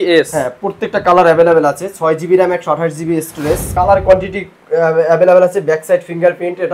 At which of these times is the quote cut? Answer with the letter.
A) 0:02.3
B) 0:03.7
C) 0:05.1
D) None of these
B